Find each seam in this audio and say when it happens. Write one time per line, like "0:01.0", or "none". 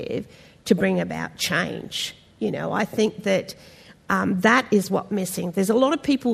none